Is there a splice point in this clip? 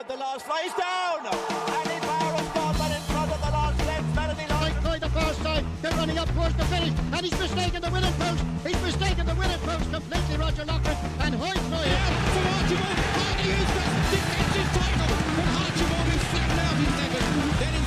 no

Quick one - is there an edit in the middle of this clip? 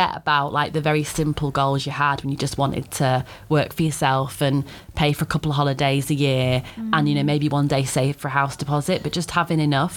no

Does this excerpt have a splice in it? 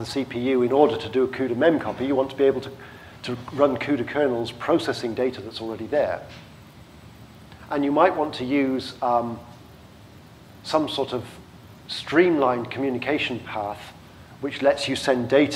no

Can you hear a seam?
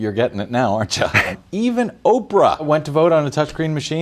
yes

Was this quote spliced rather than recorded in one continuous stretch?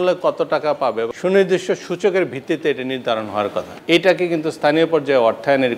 yes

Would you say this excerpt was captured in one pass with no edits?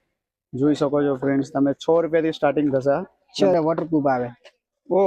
no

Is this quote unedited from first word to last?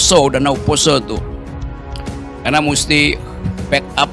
yes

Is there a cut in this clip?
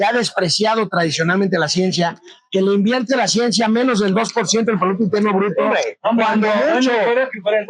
no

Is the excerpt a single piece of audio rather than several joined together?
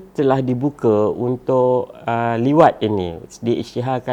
yes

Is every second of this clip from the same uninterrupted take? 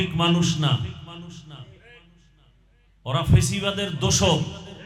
yes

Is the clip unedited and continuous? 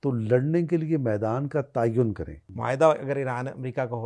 no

